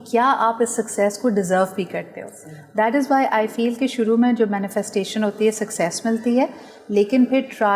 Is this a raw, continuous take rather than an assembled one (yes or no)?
yes